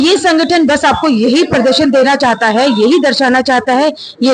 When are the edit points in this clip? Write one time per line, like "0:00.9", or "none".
none